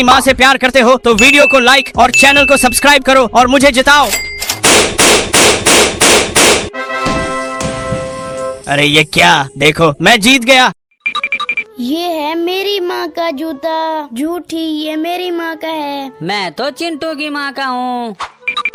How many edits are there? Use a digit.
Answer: 0